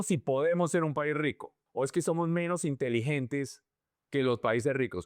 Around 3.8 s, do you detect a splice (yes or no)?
no